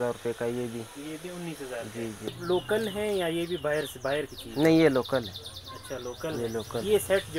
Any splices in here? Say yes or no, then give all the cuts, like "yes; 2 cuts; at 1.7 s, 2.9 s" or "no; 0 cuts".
yes; 1 cut; at 2.4 s